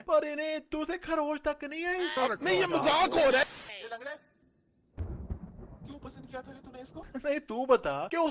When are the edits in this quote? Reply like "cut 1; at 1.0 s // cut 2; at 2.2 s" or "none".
cut 1; at 2.2 s // cut 2; at 3.4 s // cut 3; at 7.1 s